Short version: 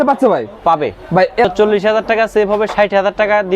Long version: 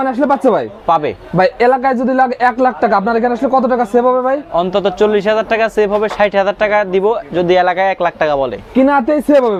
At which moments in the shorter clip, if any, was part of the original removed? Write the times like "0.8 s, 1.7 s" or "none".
1.4 s